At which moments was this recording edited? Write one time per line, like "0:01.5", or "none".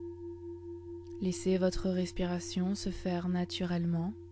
0:01.2

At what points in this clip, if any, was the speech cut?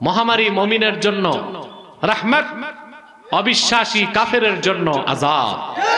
none

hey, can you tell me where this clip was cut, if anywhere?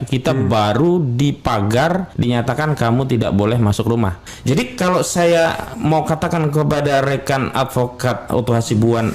0:02.1
0:04.3

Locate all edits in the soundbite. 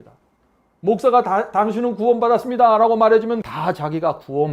0:03.4

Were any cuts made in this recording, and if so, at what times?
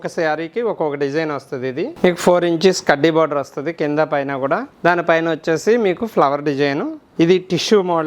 0:01.9
0:04.7
0:06.9

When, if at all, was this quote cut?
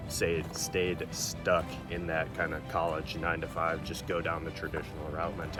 none

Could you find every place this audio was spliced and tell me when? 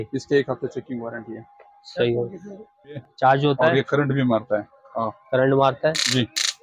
0:03.0

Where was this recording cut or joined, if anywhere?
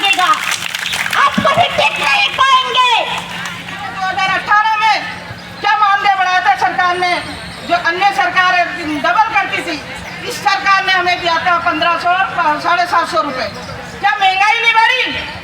0:03.9

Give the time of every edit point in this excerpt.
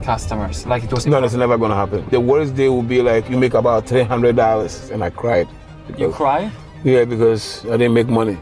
0:02.1
0:04.8

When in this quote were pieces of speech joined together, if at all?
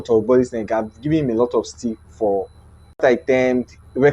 0:03.0

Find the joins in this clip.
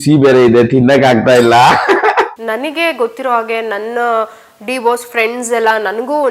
0:02.3

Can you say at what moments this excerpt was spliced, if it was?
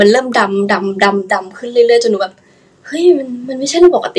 none

